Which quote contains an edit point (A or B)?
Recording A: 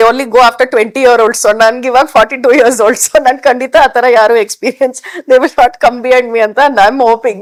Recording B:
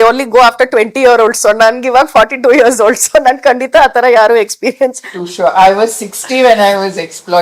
B